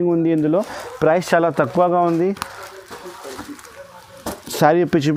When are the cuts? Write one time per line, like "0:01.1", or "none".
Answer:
none